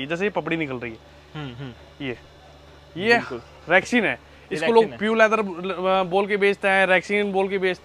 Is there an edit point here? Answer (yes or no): no